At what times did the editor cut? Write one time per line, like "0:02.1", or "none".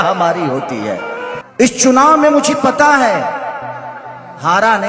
0:01.4